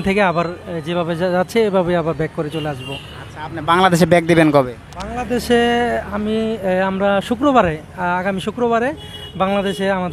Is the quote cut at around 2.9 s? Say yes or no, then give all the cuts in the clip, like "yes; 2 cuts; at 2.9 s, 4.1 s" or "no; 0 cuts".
no; 0 cuts